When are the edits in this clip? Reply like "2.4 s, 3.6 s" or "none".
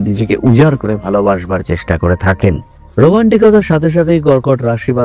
none